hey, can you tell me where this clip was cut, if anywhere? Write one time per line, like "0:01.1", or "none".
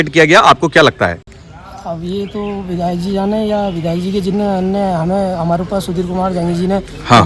none